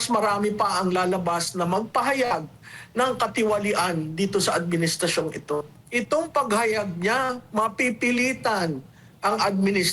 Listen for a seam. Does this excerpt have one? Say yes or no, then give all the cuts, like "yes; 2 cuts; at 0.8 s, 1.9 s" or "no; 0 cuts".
yes; 1 cut; at 5.8 s